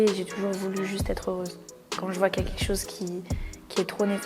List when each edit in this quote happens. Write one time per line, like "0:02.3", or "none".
0:01.9